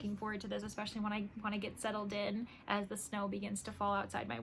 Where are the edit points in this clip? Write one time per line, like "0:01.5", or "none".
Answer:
none